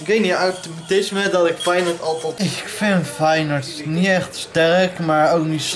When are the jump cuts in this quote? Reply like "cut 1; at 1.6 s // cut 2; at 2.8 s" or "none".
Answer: cut 1; at 2.3 s